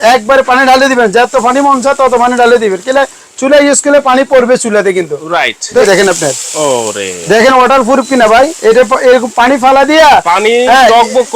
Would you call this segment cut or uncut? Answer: cut